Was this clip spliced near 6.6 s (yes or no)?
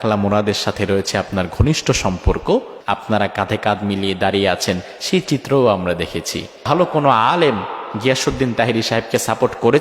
yes